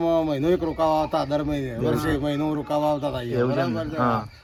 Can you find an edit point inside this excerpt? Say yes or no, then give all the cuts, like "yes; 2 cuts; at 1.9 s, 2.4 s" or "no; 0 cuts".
no; 0 cuts